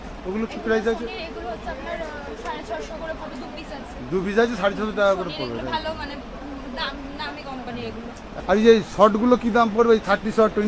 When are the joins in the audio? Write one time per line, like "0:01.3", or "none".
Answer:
none